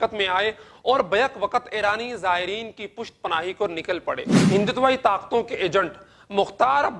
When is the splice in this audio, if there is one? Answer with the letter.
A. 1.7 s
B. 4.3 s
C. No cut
B